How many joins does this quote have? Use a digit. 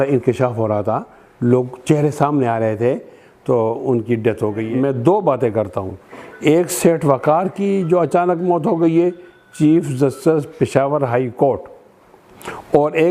1